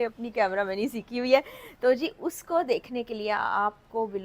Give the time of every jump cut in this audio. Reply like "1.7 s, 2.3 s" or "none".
none